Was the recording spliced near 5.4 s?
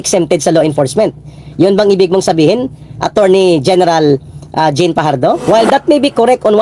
yes; 1 cut; at 5.4 s

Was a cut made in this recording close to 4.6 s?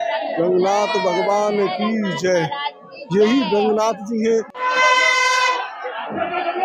yes; 1 cut; at 4.6 s

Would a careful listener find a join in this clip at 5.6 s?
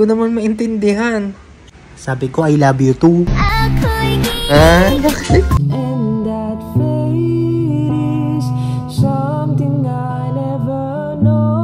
yes; 1 cut; at 5.6 s

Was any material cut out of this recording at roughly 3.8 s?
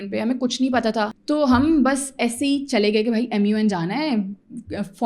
no; 1 cut; at 1.1 s

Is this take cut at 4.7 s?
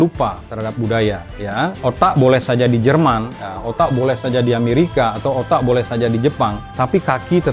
no; 2 cuts; at 1.8 s, 6.6 s

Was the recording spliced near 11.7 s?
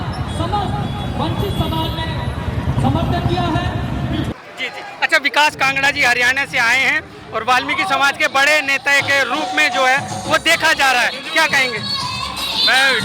no; 1 cut; at 4.3 s

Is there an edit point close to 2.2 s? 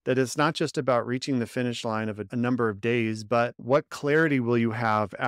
yes; 2 cuts; at 2.2 s, 3.6 s

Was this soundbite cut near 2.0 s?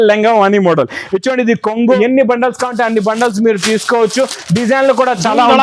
yes; 1 cut; at 2.0 s

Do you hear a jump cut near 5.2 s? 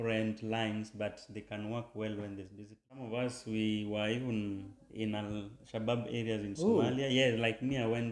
no; 1 cut; at 3.1 s

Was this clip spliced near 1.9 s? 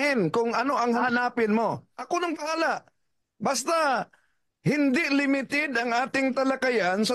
yes; 2 cuts; at 1.0 s, 1.9 s

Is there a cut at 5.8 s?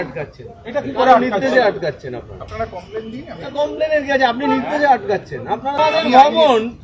yes; 1 cut; at 5.8 s

